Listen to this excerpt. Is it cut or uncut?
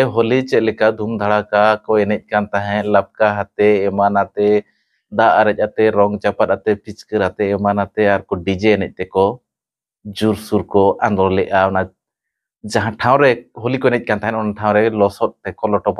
uncut